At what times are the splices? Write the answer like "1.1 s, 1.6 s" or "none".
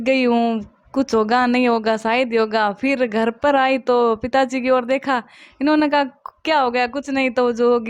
none